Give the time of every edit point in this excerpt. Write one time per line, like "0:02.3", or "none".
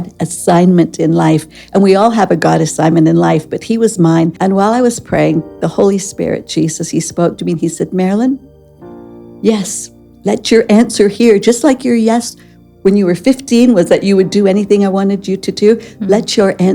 0:04.3